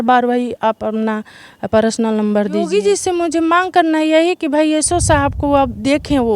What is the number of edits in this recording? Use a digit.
1